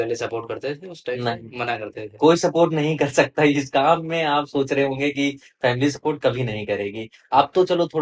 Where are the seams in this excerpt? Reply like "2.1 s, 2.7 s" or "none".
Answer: none

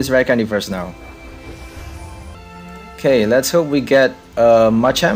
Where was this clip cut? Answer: 2.4 s

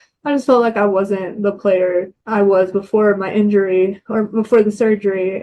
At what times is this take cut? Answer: 2.2 s

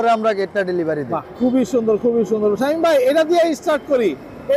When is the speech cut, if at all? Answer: none

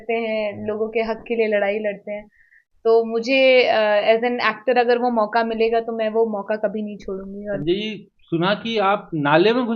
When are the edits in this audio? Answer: 7.6 s

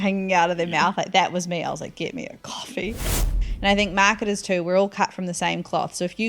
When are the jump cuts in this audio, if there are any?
3.3 s

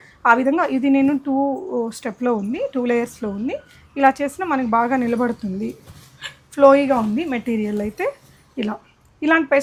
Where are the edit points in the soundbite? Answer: none

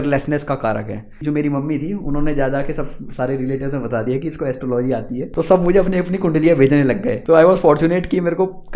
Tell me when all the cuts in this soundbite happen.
1.2 s, 5.3 s, 7.1 s

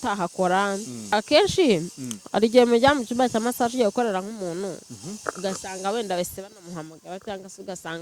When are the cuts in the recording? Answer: 1.1 s

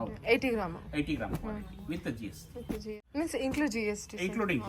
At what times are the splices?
3.0 s

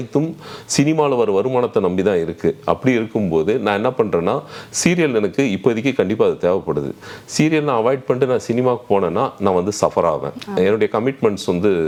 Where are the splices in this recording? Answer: none

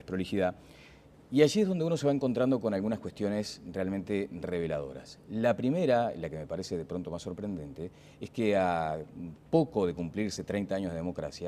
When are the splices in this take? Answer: 7.7 s

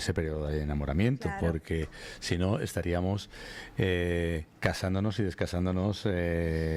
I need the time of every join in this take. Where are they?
none

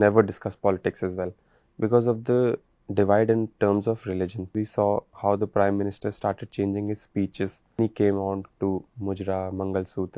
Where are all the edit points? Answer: 4.4 s, 7.8 s

